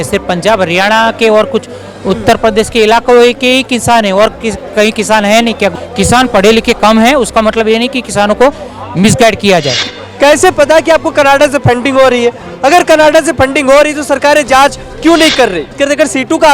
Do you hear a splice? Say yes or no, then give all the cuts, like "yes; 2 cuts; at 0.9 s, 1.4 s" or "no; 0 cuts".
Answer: yes; 3 cuts; at 5.8 s, 9.8 s, 15.8 s